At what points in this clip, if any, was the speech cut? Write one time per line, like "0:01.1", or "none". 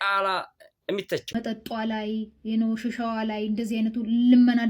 0:01.4